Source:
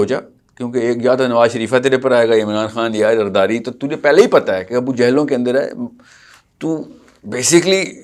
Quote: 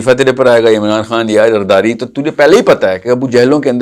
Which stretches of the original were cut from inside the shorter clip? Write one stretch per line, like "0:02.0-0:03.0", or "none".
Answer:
none